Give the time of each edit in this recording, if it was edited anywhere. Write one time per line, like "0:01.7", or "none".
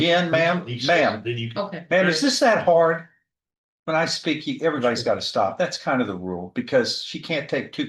none